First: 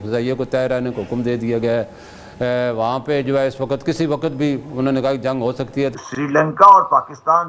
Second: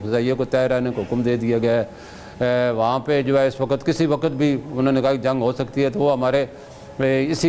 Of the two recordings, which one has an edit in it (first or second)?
first